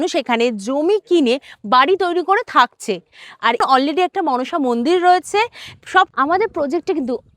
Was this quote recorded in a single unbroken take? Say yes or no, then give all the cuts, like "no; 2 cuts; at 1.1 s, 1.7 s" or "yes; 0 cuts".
no; 2 cuts; at 3.6 s, 6.1 s